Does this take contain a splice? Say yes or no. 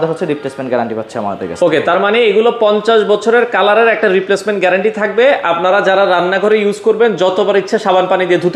no